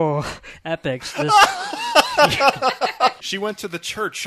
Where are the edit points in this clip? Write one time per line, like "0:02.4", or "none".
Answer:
0:03.3